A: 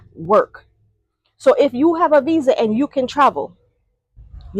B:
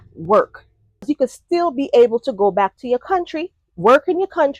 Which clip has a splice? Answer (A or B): B